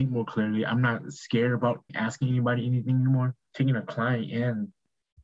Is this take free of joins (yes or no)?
no